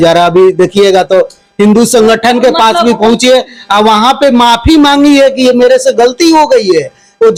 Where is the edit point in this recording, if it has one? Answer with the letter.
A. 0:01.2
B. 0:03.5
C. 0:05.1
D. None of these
D